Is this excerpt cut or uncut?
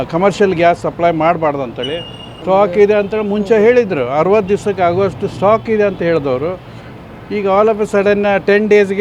cut